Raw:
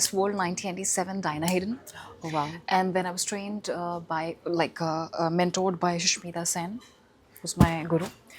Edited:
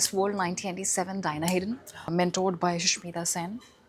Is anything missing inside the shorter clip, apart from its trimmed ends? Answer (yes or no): yes